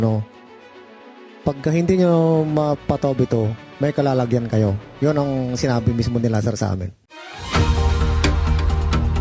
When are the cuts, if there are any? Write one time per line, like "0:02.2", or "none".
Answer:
none